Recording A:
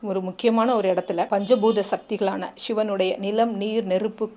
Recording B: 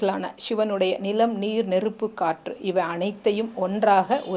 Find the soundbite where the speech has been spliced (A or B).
A